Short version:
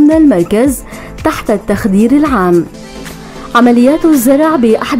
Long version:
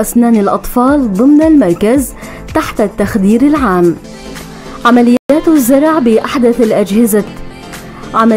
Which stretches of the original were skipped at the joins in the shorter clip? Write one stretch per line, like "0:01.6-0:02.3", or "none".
0:05.2-0:05.3